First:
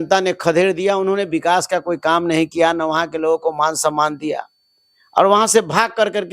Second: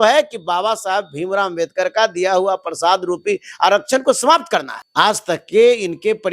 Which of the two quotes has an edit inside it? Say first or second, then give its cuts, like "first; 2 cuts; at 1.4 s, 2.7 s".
second; 1 cut; at 4.8 s